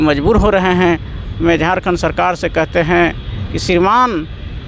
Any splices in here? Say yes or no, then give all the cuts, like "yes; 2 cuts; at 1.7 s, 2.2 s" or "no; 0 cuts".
no; 0 cuts